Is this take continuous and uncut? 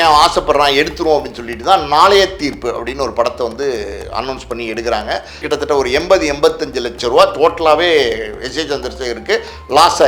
no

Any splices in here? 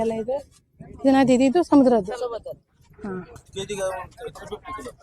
yes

